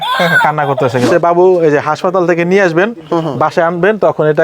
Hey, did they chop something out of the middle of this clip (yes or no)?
yes